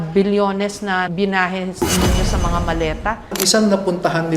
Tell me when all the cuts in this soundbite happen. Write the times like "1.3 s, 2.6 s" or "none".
3.4 s